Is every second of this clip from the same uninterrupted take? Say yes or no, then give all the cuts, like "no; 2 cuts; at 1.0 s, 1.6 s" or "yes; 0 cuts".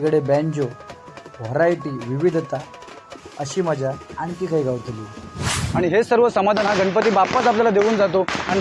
no; 1 cut; at 5.6 s